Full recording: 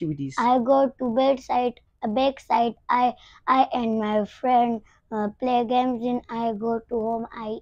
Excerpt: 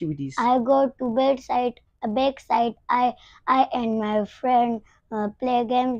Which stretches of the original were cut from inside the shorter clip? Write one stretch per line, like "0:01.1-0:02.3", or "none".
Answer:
none